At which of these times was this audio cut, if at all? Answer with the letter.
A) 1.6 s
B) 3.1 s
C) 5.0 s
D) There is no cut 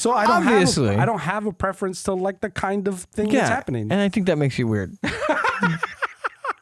D